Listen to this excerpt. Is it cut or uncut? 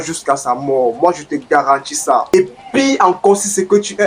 cut